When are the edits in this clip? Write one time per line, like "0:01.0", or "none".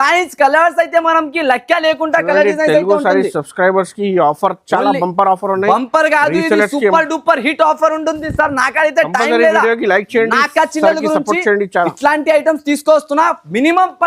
none